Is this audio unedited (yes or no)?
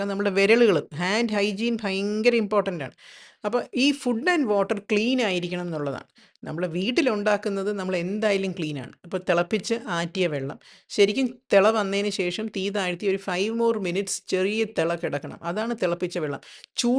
yes